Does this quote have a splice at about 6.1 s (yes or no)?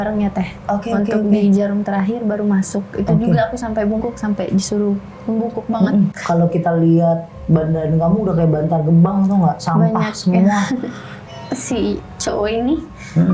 yes